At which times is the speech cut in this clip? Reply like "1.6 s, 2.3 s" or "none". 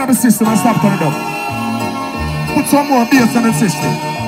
none